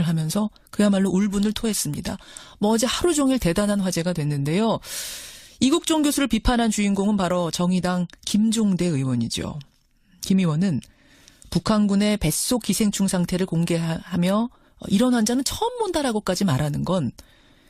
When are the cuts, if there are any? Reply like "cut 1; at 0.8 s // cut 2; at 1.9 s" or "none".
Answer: cut 1; at 1.9 s